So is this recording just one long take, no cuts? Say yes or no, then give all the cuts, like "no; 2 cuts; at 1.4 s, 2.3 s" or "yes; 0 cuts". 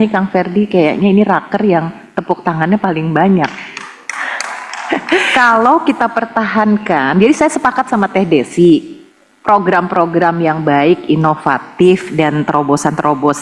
no; 1 cut; at 5.3 s